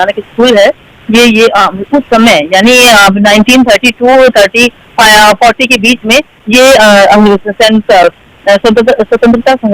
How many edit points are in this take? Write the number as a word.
zero